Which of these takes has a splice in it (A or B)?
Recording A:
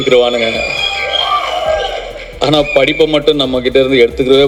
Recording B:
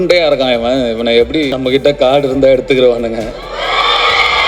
B